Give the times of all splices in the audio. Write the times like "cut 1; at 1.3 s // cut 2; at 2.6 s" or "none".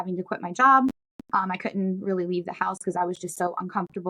none